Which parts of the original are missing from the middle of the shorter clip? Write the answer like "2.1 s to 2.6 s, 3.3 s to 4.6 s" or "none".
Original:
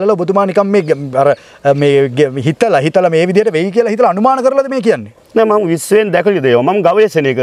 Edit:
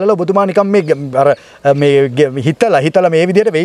none